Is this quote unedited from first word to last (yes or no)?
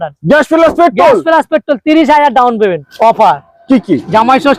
no